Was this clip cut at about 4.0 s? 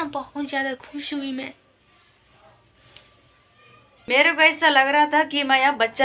yes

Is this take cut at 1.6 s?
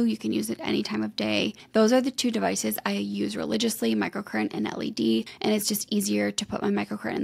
yes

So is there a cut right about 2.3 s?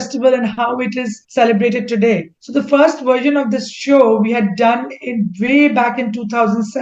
yes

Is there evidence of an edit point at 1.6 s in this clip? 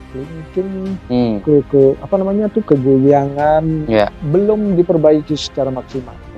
no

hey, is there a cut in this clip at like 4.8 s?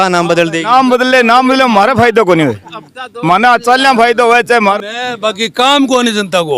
yes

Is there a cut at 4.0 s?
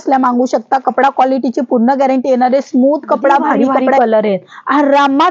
yes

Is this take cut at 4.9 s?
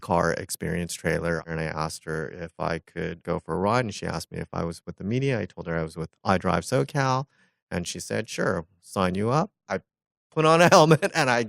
no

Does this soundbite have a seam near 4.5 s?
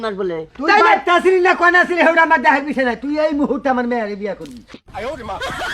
yes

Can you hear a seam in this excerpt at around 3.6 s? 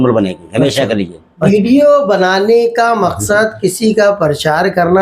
no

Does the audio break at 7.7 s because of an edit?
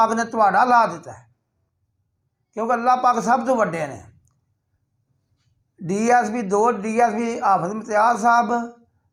no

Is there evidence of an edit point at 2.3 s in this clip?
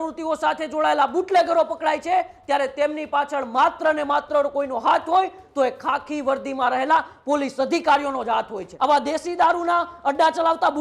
no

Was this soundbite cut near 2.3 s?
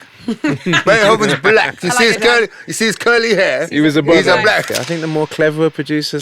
no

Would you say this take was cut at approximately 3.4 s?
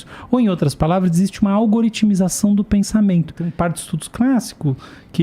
yes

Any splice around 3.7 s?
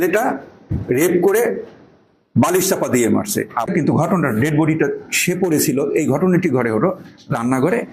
yes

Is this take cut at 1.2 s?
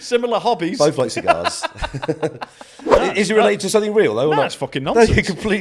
no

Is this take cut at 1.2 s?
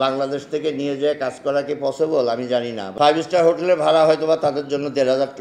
no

